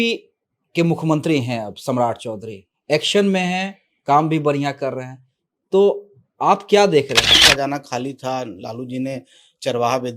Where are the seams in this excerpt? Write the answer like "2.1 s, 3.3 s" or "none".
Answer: 7.4 s